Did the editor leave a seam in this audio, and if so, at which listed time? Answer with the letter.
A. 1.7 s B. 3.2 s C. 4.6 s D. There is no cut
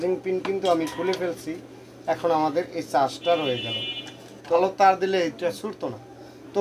C